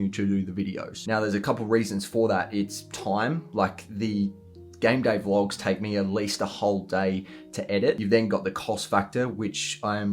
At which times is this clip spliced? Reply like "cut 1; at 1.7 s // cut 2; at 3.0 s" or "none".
none